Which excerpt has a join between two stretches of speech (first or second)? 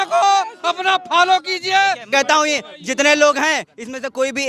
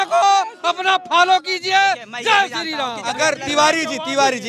first